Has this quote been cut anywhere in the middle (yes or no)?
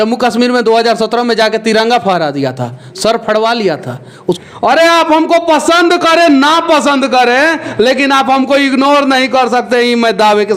yes